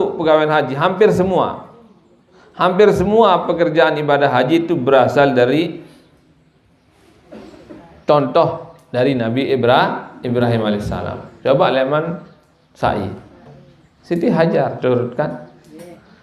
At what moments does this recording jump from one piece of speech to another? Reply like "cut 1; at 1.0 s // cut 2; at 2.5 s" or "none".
none